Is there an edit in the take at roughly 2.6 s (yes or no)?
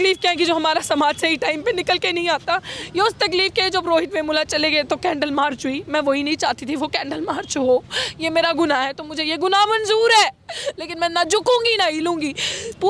no